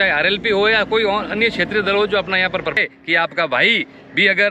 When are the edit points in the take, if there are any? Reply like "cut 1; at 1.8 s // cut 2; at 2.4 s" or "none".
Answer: cut 1; at 2.8 s